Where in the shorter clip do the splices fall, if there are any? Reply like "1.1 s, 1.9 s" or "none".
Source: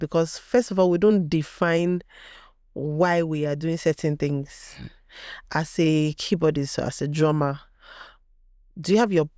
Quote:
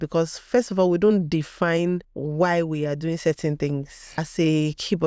2.1 s, 4.2 s